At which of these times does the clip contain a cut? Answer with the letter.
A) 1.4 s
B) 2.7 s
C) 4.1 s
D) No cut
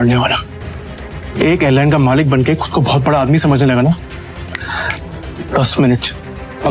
D